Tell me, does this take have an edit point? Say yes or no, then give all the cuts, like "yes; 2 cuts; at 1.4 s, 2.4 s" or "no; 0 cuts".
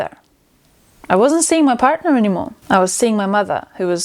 yes; 1 cut; at 2.5 s